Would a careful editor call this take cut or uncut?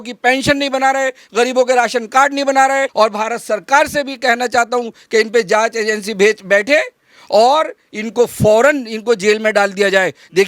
cut